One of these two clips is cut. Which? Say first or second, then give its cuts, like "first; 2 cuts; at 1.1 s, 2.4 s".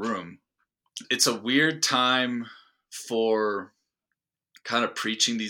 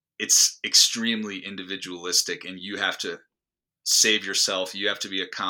first; 1 cut; at 1.0 s